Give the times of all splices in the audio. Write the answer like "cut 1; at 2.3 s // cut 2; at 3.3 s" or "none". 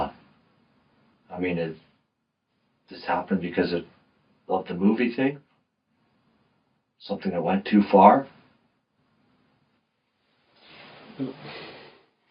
cut 1; at 1.4 s